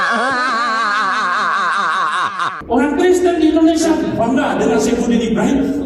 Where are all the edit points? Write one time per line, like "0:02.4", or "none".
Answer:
0:02.6